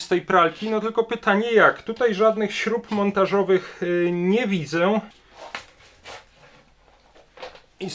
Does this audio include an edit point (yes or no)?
yes